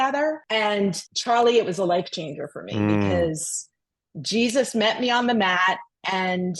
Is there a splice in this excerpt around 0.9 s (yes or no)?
yes